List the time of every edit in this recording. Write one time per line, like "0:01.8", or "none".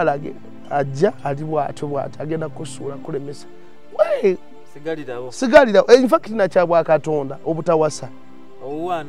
none